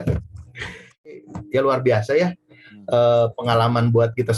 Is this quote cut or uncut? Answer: cut